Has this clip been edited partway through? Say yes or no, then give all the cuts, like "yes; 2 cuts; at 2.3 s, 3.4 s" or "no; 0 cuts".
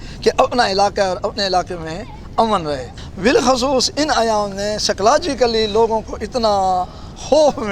yes; 1 cut; at 3.0 s